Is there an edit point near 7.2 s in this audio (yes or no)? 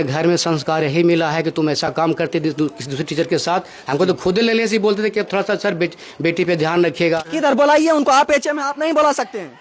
yes